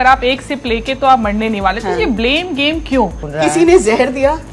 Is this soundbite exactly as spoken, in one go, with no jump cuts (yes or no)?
no